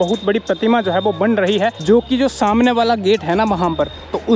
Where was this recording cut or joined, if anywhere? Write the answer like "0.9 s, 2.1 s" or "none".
1.8 s